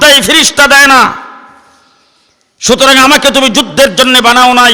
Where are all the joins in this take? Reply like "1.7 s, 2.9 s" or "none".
none